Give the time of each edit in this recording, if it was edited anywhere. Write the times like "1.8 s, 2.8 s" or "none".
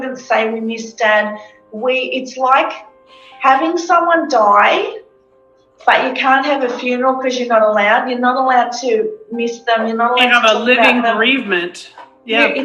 none